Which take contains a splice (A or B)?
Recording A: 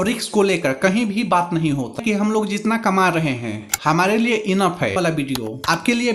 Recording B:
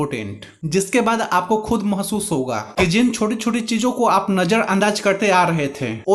A